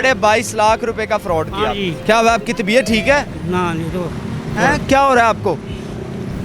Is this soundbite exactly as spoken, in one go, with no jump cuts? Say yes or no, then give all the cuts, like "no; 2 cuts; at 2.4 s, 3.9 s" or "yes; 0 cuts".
no; 1 cut; at 1.9 s